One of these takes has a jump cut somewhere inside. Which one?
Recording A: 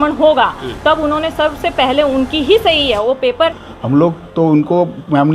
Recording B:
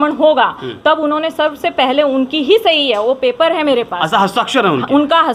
A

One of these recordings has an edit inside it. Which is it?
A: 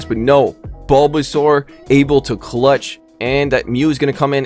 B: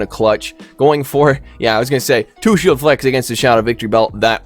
A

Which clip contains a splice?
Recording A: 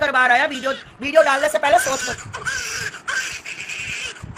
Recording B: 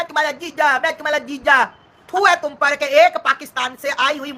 B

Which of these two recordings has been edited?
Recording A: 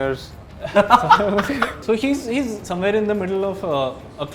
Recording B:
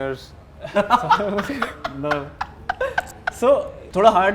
A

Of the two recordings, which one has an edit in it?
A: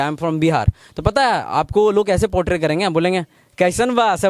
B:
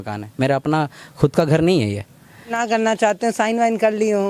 B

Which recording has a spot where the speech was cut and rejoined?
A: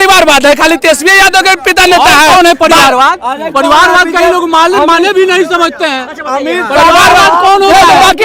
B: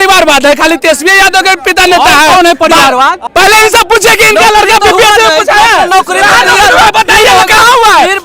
B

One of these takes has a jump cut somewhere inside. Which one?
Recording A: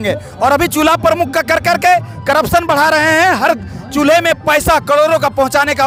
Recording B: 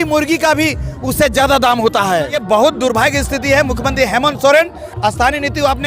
B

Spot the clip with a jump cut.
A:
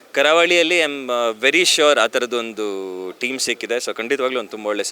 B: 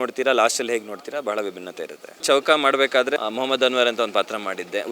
B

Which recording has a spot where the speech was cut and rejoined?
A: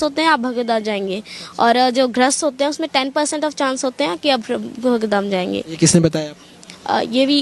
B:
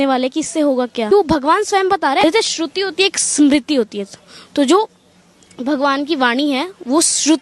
B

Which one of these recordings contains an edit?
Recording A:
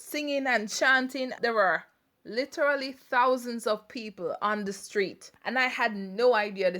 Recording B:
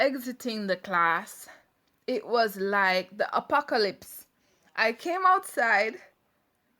A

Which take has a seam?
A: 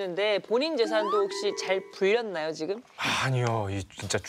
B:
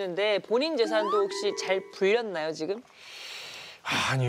A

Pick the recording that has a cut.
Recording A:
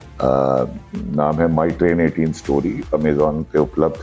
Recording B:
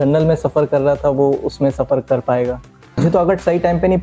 B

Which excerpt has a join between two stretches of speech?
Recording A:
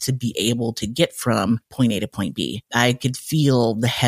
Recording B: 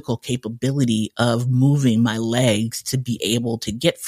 A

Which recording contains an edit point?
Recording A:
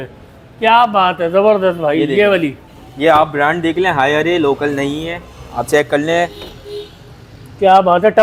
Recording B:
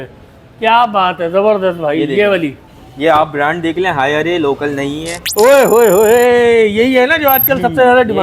B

